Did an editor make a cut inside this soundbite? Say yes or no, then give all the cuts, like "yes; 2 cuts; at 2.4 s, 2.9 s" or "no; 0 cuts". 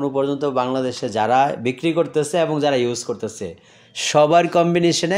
no; 0 cuts